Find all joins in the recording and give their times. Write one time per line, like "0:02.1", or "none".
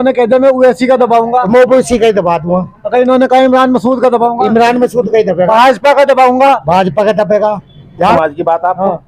0:08.1